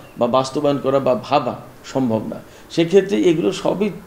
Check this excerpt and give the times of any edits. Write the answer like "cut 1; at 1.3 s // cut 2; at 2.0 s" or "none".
none